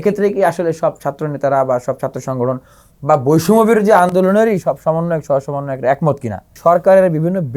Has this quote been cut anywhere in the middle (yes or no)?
yes